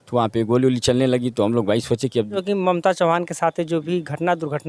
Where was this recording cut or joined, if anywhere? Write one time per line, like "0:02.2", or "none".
0:02.5